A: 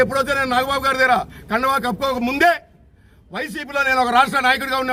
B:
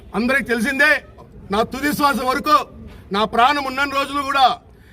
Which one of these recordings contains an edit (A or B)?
B